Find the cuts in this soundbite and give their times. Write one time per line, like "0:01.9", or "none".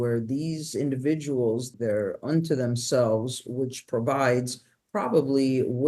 0:01.7

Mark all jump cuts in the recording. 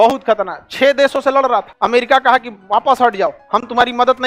0:01.7
0:02.5

